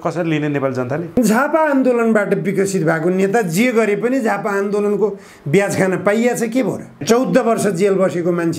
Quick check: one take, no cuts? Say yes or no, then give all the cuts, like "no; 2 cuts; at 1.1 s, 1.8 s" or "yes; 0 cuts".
no; 1 cut; at 7.0 s